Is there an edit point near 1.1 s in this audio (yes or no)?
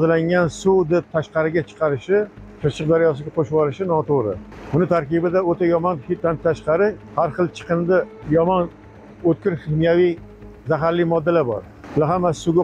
no